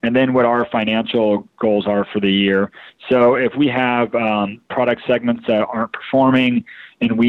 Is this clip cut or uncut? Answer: uncut